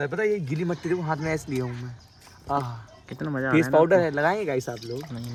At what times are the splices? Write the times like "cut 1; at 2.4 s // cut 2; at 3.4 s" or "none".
none